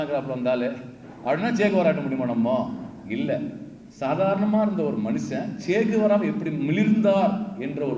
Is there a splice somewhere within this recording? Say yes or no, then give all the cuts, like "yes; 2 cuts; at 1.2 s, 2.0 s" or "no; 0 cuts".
no; 0 cuts